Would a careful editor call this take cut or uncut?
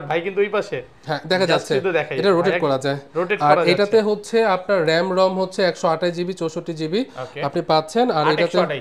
uncut